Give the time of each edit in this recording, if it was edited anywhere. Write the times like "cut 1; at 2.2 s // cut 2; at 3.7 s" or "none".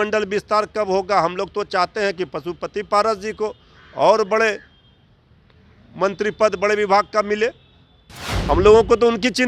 none

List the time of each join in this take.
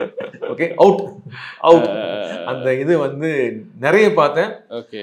none

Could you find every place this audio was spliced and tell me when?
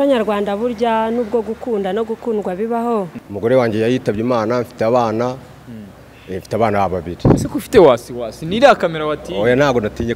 cut 1; at 3.2 s

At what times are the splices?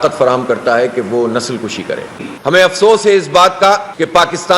cut 1; at 2.3 s

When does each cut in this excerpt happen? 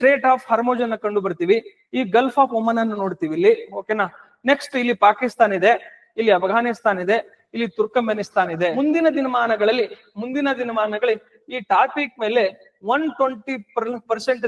cut 1; at 8.7 s

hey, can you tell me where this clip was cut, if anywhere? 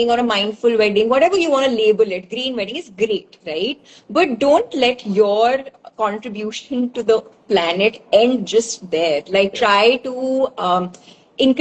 none

